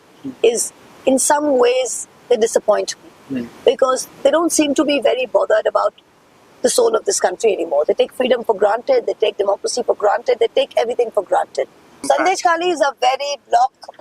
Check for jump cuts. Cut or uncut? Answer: cut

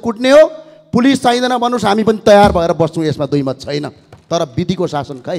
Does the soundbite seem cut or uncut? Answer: uncut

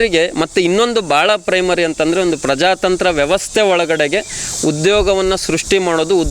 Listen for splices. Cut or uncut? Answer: uncut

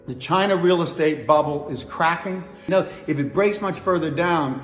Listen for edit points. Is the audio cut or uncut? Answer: cut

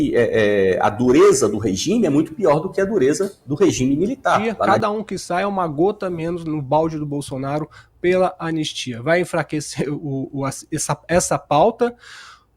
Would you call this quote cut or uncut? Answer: cut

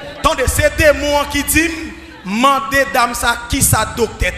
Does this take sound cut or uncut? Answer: uncut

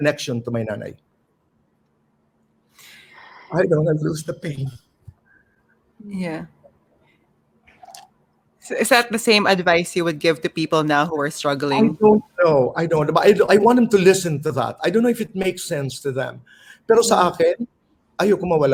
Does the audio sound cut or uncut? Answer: uncut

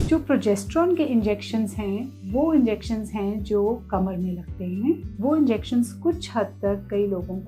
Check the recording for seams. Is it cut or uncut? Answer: cut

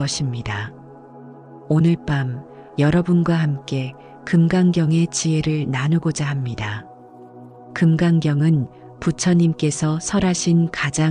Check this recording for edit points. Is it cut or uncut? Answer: uncut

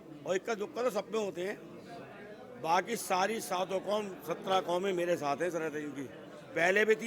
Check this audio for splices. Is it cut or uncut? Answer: uncut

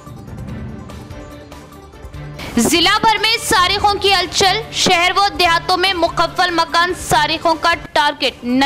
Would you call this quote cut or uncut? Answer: cut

